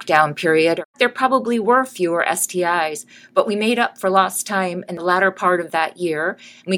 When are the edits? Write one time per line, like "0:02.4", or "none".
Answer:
0:00.9
0:04.9